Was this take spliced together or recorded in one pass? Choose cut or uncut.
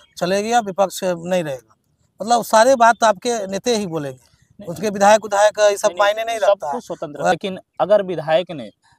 cut